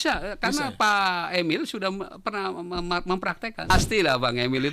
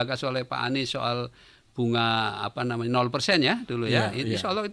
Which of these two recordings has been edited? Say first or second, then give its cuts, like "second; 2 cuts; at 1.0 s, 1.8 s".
first; 1 cut; at 3.7 s